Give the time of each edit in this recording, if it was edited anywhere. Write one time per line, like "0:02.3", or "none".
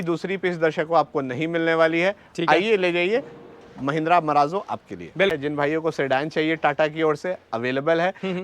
0:05.3